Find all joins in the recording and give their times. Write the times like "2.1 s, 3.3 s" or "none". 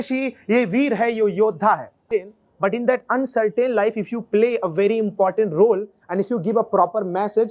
2.0 s